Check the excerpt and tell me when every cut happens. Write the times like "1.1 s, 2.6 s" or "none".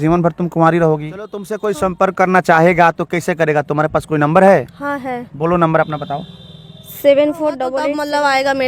1.5 s, 7.8 s